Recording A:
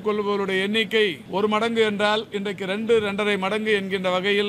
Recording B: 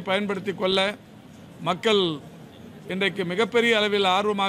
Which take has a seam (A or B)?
A